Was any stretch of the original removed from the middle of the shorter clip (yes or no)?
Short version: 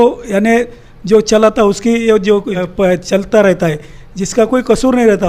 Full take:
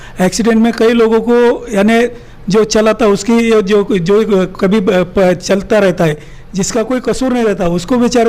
yes